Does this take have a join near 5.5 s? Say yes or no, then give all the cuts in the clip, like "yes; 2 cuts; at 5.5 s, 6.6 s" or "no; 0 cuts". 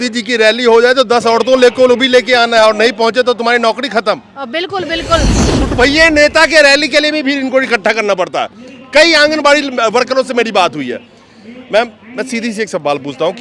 yes; 1 cut; at 5.5 s